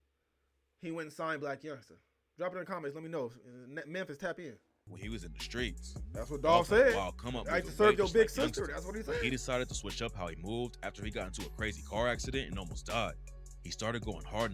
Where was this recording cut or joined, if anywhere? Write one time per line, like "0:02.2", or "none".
0:04.9